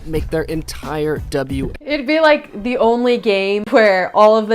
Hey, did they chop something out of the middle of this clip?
yes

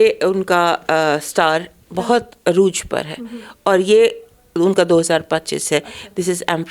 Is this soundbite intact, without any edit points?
yes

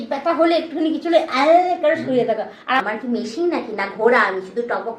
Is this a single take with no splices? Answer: no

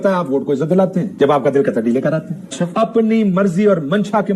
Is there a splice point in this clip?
yes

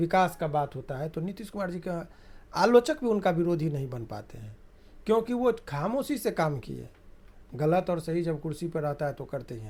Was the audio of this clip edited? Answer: no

